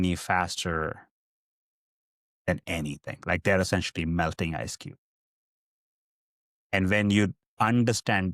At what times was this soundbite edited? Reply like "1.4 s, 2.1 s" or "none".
none